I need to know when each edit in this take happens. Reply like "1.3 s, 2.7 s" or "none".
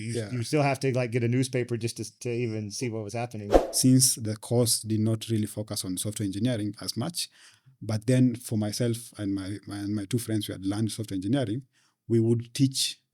3.5 s